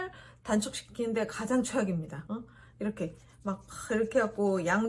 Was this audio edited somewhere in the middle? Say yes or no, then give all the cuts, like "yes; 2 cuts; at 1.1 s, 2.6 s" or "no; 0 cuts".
no; 0 cuts